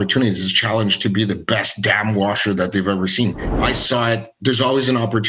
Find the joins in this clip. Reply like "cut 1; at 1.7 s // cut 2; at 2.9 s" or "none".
cut 1; at 3.5 s

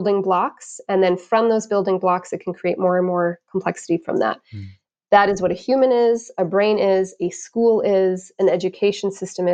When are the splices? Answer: none

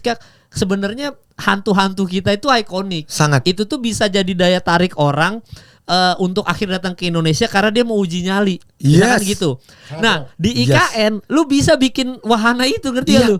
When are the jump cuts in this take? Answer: none

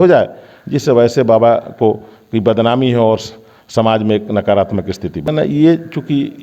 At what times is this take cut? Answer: cut 1; at 5.3 s

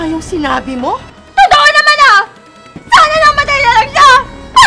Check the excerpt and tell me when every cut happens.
cut 1; at 1.2 s

